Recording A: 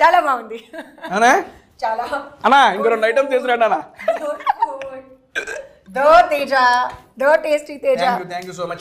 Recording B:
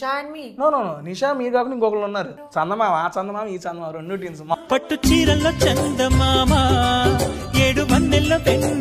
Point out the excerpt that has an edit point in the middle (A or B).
B